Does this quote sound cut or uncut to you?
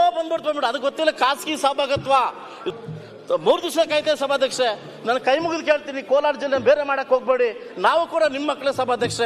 cut